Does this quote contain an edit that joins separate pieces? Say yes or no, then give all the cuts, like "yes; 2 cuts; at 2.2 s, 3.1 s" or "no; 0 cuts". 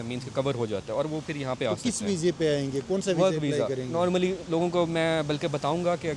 no; 0 cuts